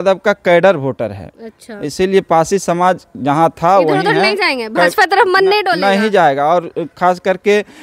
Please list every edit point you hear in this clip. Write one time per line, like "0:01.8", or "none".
none

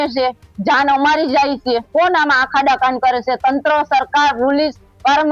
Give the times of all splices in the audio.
0:01.9

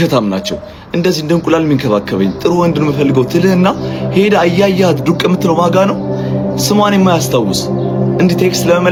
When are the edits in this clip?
none

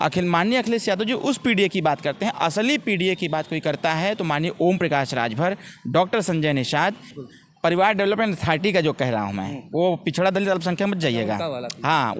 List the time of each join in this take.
0:07.1

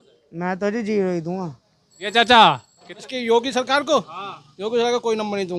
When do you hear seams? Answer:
none

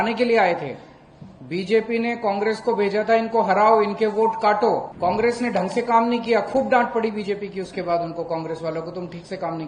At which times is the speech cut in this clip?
0:04.9

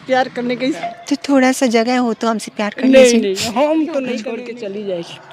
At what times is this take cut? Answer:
0:00.8
0:04.3

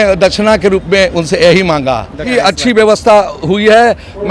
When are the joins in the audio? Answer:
0:02.3

